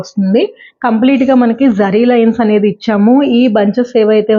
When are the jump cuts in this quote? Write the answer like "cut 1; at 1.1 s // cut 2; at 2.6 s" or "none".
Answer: none